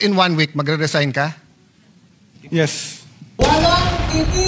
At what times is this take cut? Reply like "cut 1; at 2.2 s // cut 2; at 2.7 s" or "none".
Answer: cut 1; at 3.2 s